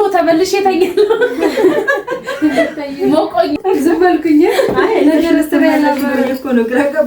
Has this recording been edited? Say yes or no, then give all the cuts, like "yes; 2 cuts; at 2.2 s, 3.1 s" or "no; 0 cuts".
yes; 1 cut; at 3.6 s